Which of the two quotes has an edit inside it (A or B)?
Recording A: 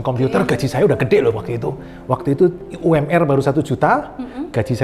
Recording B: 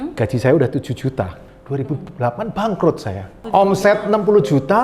B